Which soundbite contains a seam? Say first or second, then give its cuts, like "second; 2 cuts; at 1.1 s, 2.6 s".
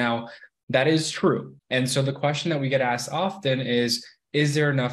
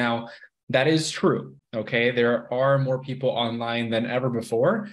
first; 1 cut; at 1.5 s